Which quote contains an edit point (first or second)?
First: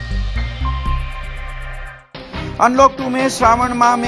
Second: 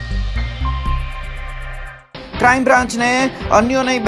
first